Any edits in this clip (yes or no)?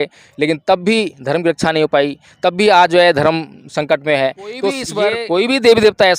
yes